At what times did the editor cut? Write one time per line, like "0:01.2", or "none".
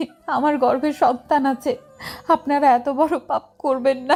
none